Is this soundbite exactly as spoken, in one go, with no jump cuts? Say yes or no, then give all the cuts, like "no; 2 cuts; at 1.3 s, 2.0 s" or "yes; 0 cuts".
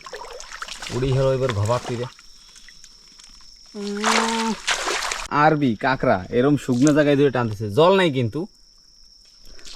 no; 1 cut; at 5.3 s